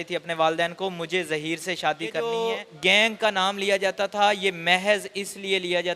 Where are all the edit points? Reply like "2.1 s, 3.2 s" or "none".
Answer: 2.2 s